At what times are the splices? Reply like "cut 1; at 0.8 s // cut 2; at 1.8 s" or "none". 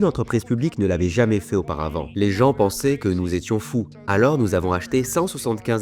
cut 1; at 2.0 s // cut 2; at 4.0 s